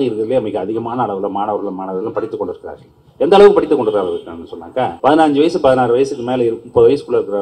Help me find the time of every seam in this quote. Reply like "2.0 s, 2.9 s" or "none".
4.9 s